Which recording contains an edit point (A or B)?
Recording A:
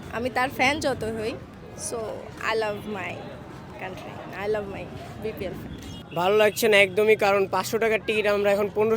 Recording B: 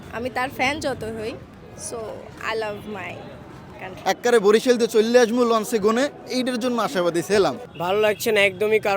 B